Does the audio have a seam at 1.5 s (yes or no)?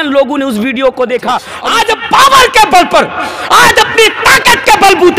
yes